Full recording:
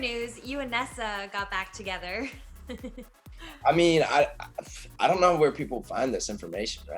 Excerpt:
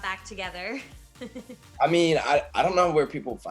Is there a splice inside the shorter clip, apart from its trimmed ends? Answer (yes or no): yes